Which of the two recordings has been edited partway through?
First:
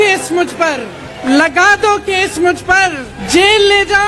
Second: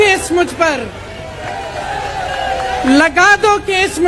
first; 2 cuts; at 1.2 s, 3.1 s

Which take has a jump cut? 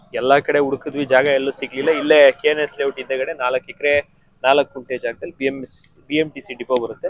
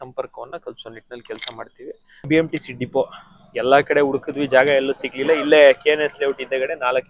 second; 1 cut; at 2.3 s

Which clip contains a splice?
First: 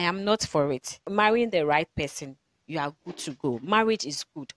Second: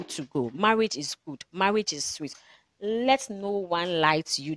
first; 1 cut; at 1.0 s

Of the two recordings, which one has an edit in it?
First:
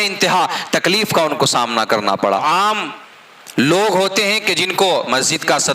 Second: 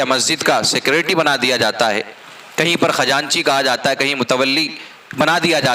first; 1 cut; at 2.4 s

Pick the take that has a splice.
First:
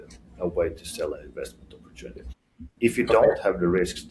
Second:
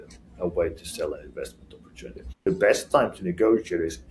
second; 1 cut; at 2.4 s

